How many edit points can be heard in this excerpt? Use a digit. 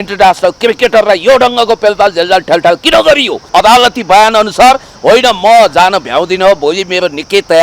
1